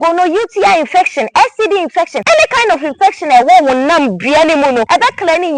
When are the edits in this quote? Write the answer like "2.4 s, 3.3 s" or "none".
2.2 s, 4.9 s

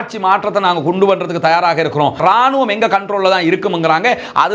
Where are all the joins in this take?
2.2 s

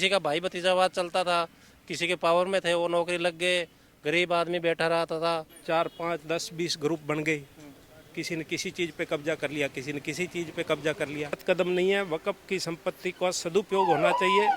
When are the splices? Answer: 5.5 s, 11.4 s

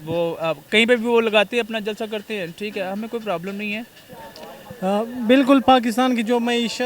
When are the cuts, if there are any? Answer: 4.2 s

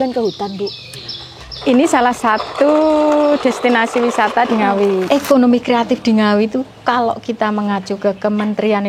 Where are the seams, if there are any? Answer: 5.1 s

